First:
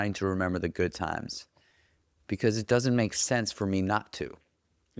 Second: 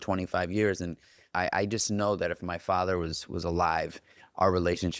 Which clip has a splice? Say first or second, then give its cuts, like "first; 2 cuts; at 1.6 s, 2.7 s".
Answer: second; 1 cut; at 1.2 s